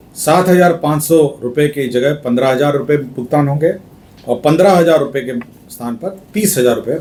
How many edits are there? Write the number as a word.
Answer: zero